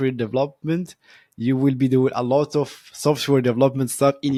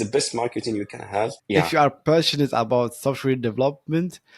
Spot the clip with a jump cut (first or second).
second